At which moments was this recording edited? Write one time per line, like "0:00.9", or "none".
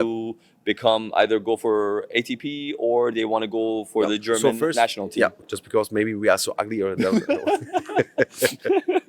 0:05.4